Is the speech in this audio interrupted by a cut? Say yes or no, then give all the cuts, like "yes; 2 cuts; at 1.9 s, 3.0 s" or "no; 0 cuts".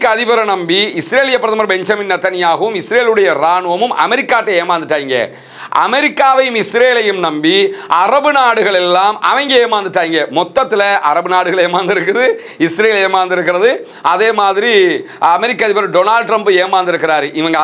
no; 0 cuts